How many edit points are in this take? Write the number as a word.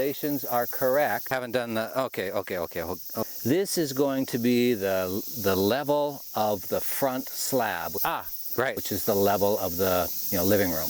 one